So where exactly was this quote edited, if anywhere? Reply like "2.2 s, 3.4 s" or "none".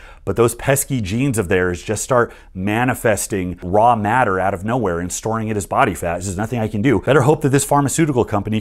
3.6 s, 7.0 s